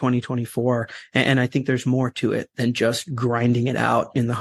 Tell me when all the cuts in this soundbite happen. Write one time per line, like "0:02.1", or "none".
none